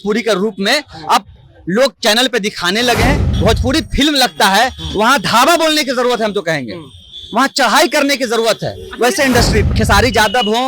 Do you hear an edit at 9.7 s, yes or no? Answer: yes